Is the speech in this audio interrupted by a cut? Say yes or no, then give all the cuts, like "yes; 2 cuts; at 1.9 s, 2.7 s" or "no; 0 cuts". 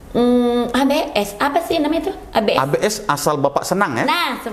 no; 0 cuts